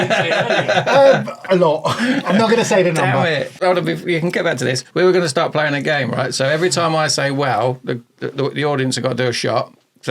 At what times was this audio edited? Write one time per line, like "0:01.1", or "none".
0:03.6